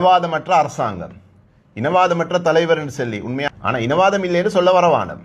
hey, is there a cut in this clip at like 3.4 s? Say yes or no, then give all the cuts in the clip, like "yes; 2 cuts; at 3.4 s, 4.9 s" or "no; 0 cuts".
yes; 1 cut; at 3.4 s